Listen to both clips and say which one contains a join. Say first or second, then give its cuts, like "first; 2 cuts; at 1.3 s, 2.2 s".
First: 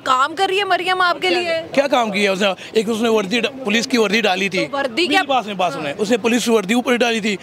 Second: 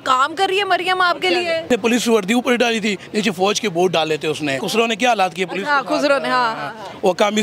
second; 2 cuts; at 1.7 s, 4.6 s